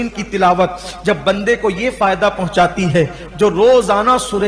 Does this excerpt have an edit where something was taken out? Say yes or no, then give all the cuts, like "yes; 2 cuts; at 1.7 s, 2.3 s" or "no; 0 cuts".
no; 0 cuts